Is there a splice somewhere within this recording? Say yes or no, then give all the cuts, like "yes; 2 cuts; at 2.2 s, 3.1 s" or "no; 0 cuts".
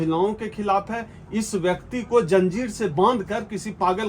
no; 0 cuts